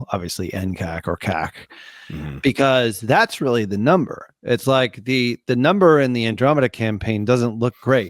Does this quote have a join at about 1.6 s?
no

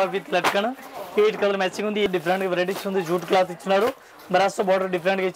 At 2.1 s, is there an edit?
yes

